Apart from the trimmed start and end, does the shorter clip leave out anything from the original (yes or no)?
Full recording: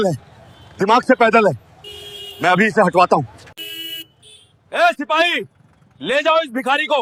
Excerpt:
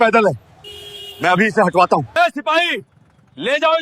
yes